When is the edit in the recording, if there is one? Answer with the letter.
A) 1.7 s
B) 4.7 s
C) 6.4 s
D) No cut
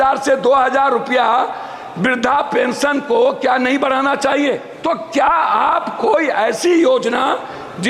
B